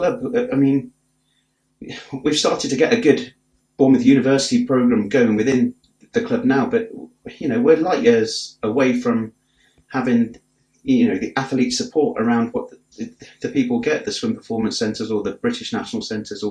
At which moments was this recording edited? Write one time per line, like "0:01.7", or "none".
none

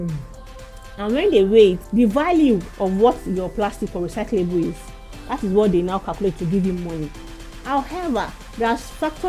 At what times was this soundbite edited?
0:01.8
0:02.7

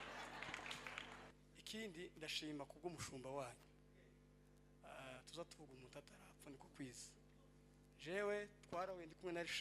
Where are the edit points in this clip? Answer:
0:01.3

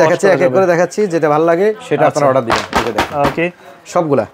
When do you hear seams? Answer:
none

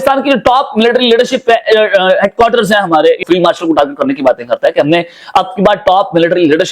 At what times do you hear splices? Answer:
0:03.2

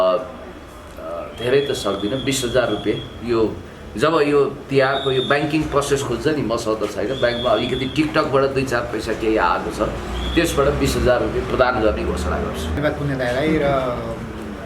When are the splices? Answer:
0:12.8

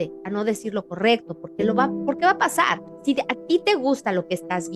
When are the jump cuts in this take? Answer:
0:02.9

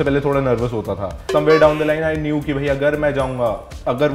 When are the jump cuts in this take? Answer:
0:01.1

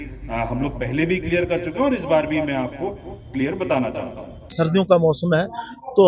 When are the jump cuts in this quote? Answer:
0:04.5

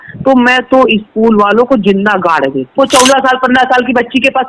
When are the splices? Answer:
0:02.8

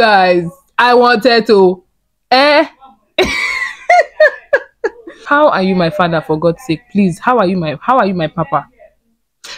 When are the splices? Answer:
0:05.2

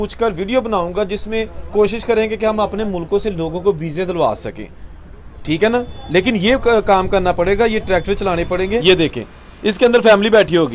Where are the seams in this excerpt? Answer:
0:08.8

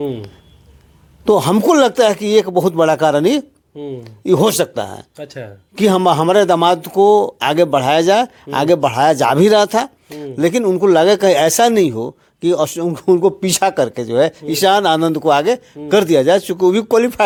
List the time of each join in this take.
none

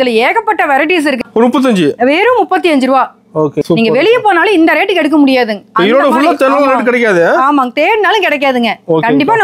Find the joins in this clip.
0:01.2
0:03.6

